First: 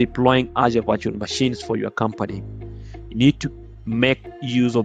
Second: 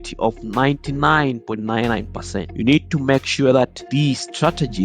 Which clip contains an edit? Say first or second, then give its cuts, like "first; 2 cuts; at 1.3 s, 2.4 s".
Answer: second; 2 cuts; at 2.5 s, 3.8 s